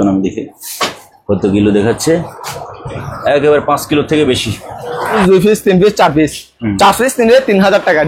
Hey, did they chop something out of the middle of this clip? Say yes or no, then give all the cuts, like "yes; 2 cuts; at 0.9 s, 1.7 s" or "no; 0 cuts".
yes; 1 cut; at 5.2 s